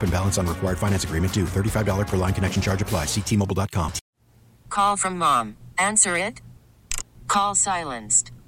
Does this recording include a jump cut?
yes; 1 cut; at 4.0 s

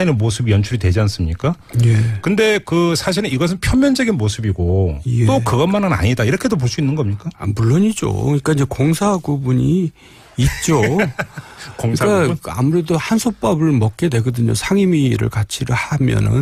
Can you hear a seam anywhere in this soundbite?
no; 0 cuts

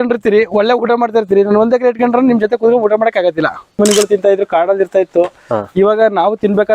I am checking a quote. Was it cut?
yes; 1 cut; at 3.7 s

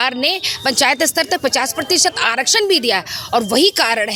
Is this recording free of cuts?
yes; 0 cuts

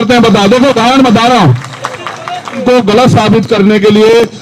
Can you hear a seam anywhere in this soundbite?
yes; 1 cut; at 2.6 s

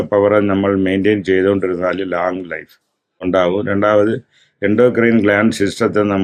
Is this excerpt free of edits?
yes; 0 cuts

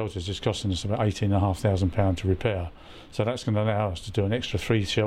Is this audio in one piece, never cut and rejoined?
yes; 0 cuts

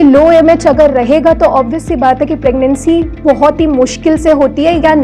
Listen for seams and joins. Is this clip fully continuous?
yes; 0 cuts

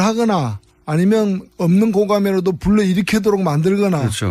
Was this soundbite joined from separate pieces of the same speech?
yes; 1 cut; at 2.9 s

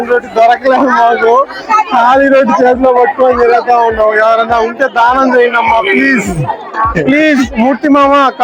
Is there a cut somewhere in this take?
no; 0 cuts

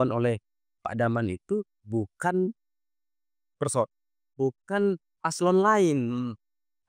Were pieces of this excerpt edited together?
no; 0 cuts

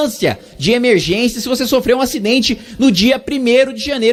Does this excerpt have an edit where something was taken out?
no; 0 cuts

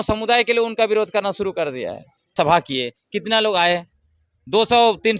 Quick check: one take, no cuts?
no; 1 cut; at 2.3 s

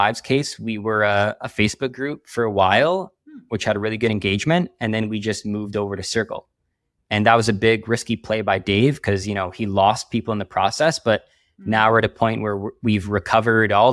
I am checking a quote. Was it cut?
no; 0 cuts

